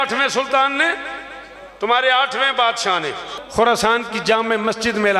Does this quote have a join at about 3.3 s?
yes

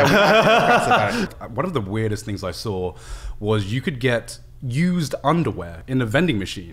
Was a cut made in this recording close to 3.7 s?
no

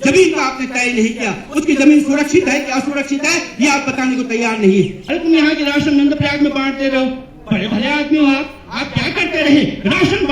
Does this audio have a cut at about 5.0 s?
yes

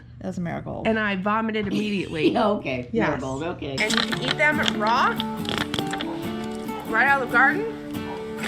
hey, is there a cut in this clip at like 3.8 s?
yes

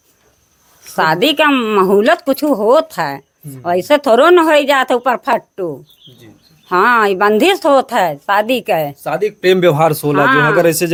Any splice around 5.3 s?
no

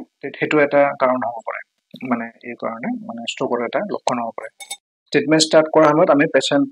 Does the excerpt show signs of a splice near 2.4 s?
no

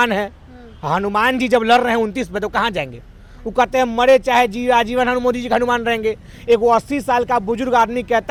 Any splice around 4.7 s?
no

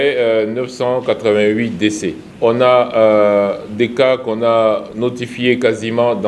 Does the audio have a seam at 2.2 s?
yes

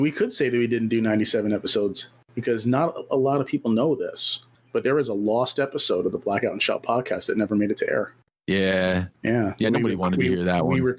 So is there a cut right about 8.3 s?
yes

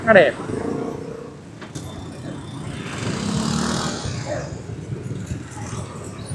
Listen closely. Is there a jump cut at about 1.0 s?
yes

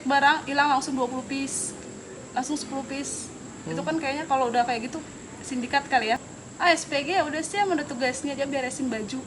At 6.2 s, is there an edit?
yes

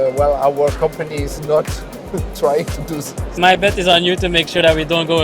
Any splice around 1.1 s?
no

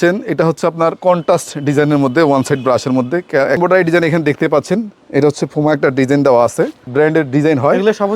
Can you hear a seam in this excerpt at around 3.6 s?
yes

